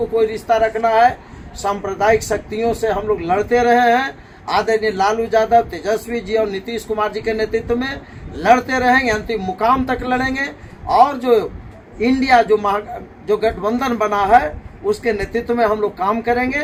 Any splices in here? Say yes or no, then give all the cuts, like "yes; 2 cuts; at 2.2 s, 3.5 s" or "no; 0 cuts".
no; 0 cuts